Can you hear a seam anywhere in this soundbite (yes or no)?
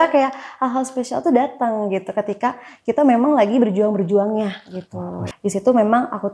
yes